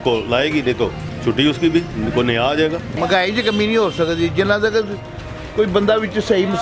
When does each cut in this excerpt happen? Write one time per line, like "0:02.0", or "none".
0:01.1
0:02.9